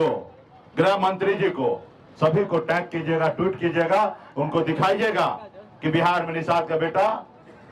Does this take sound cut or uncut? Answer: uncut